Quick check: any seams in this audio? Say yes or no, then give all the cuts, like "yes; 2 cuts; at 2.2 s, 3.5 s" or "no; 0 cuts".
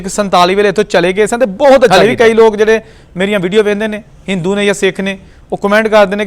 yes; 1 cut; at 1.9 s